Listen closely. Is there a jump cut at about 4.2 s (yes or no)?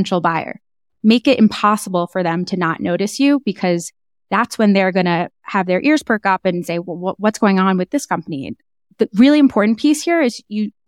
no